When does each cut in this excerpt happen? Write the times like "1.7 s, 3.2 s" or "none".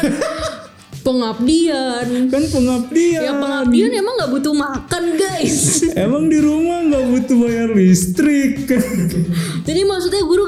none